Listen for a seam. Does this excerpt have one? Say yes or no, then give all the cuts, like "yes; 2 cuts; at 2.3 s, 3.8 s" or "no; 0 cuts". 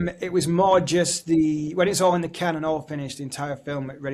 no; 0 cuts